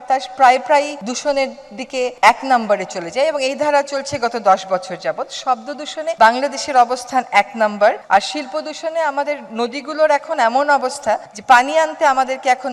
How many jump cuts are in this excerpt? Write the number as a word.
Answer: four